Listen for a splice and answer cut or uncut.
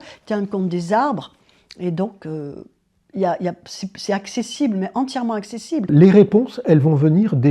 cut